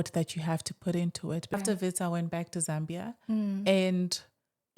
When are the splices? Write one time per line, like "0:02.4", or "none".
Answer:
0:01.5